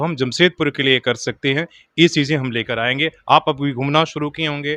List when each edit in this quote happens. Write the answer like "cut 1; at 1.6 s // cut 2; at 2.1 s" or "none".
none